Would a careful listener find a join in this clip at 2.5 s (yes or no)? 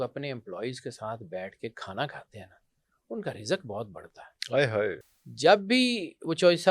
no